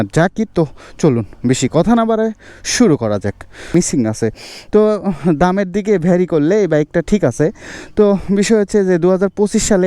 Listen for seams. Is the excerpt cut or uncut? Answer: cut